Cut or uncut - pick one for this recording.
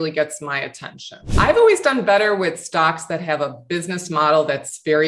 cut